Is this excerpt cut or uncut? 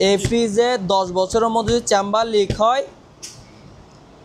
uncut